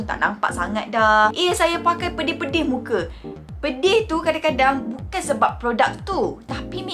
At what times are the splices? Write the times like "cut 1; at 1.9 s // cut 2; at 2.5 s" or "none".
cut 1; at 1.3 s